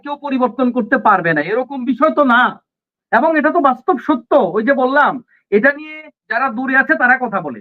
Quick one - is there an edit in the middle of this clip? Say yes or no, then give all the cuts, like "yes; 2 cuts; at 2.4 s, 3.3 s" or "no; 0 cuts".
no; 0 cuts